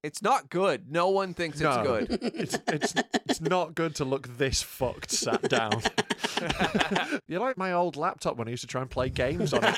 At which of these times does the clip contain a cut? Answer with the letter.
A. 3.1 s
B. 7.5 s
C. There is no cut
B